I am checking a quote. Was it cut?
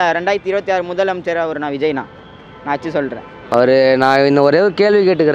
yes; 1 cut; at 3.5 s

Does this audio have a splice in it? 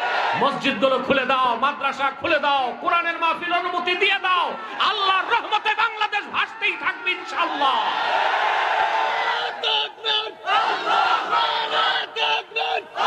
no; 0 cuts

